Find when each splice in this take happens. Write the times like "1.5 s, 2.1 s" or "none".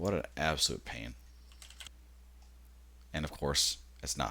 1.9 s